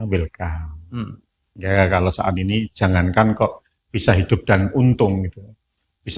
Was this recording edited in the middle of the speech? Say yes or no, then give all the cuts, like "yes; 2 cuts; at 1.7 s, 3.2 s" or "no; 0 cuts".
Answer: yes; 1 cut; at 1.5 s